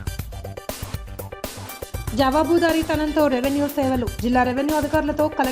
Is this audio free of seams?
yes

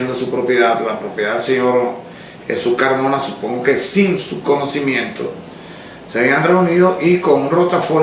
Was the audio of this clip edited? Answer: no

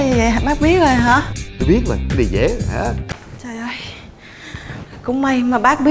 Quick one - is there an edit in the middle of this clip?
yes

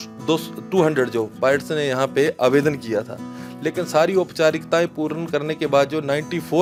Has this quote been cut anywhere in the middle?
no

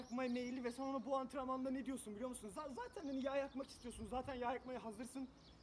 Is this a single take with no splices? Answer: yes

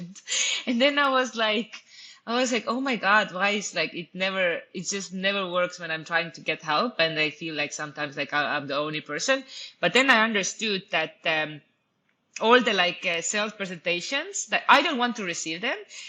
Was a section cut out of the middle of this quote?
no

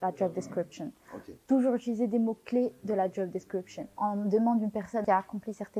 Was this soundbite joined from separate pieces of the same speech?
yes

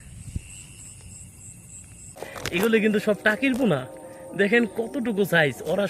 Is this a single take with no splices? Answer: no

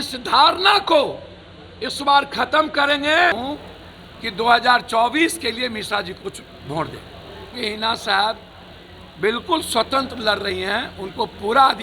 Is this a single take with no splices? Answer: no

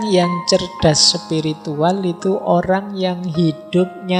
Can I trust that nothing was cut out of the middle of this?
yes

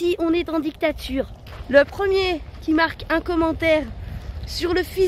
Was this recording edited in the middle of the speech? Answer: yes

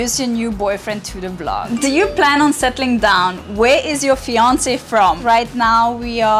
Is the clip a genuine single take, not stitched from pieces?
no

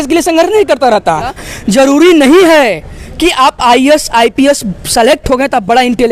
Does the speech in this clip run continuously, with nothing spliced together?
no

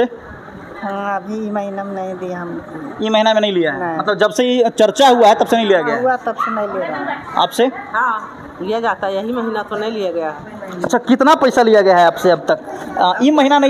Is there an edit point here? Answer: no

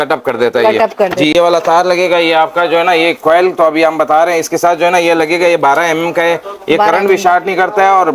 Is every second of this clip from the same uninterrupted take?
no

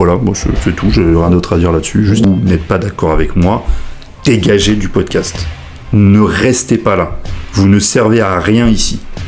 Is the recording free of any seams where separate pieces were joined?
no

